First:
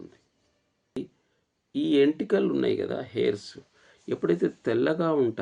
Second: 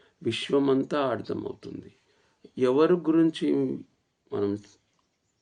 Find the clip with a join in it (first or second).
first